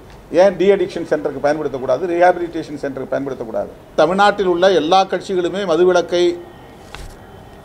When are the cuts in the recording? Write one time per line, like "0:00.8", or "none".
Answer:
0:03.9